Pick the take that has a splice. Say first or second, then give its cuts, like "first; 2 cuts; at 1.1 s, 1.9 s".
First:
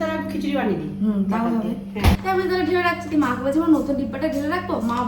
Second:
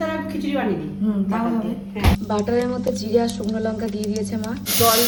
first; 1 cut; at 2.2 s